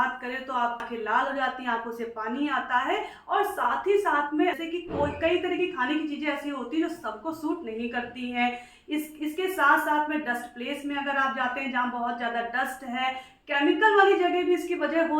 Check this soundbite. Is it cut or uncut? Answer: cut